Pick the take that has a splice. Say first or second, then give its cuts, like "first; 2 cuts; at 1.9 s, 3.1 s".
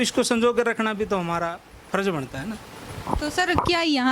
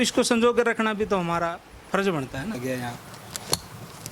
second; 1 cut; at 2.6 s